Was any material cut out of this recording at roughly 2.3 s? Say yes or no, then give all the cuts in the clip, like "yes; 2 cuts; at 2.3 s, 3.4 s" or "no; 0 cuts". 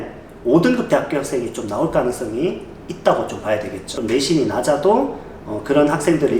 no; 1 cut; at 3.8 s